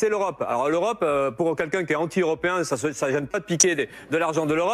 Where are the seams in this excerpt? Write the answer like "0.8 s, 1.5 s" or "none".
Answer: none